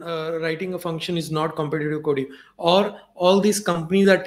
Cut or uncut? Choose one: uncut